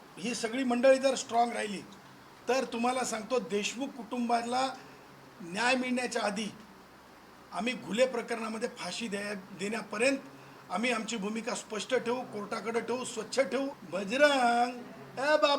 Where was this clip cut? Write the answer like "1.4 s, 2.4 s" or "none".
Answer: 13.8 s